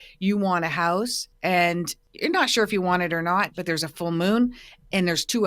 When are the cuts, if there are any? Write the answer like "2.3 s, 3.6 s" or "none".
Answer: 1.2 s, 2.0 s

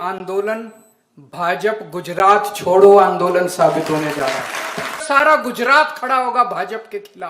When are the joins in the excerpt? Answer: 5.0 s

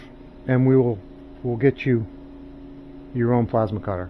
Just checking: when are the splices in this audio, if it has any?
none

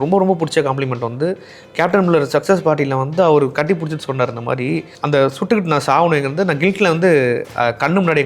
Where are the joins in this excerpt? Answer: 4.9 s

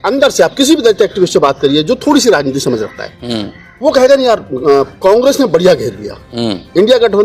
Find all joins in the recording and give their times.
none

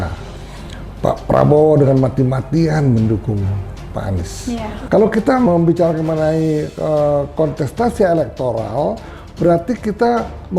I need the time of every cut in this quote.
4.8 s

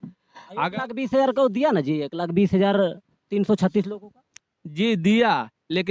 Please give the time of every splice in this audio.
none

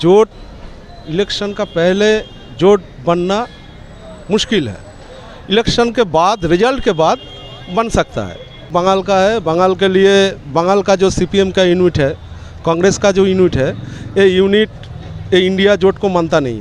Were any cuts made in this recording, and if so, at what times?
8.7 s

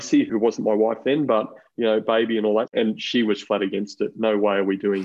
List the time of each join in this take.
2.7 s

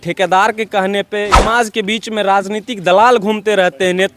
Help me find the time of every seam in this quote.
1.3 s

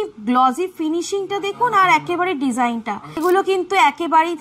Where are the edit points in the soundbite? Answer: 3.2 s

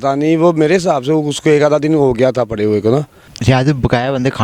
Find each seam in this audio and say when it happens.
3.3 s

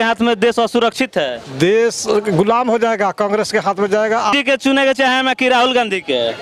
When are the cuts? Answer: 4.3 s

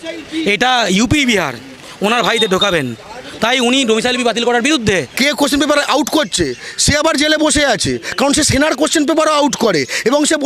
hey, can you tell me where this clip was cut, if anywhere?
5.1 s

